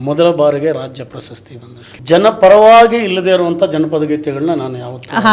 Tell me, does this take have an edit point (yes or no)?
yes